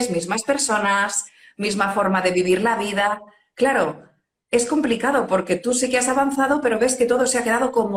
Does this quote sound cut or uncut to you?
uncut